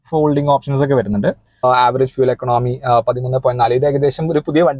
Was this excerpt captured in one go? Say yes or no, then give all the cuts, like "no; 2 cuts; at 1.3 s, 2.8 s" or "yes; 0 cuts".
no; 1 cut; at 1.5 s